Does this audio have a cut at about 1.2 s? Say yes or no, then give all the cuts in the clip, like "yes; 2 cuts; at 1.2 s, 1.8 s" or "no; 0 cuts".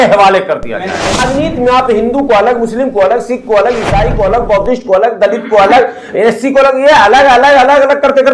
yes; 1 cut; at 1.2 s